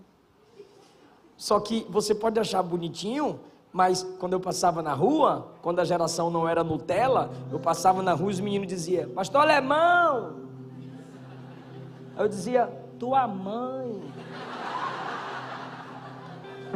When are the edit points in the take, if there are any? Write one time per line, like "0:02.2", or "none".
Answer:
none